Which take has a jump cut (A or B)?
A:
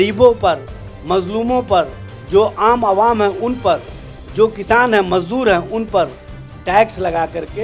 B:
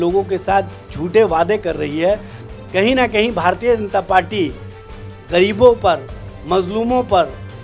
B